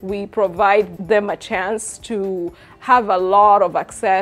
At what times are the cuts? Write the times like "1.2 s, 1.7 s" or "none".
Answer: 0.9 s